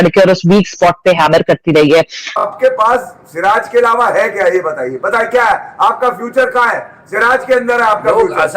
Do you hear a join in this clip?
yes; 1 cut; at 2.4 s

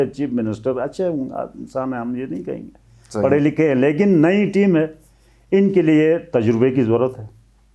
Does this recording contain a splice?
no; 0 cuts

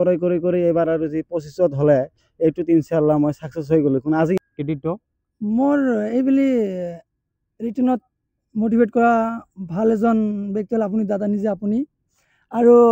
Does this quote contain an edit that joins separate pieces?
yes; 1 cut; at 4.4 s

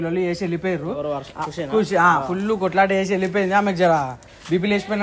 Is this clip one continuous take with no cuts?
yes; 0 cuts

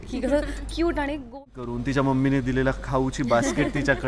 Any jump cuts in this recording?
yes; 1 cut; at 1.4 s

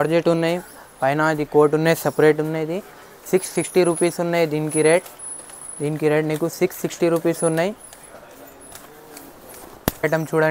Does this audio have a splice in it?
no; 0 cuts

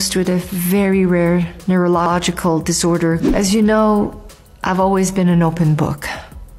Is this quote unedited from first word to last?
no; 1 cut; at 2.0 s

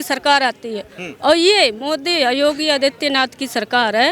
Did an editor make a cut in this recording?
no; 0 cuts

